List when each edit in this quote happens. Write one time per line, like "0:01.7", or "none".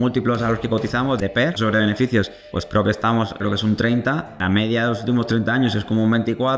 0:01.2
0:02.6
0:03.4
0:04.4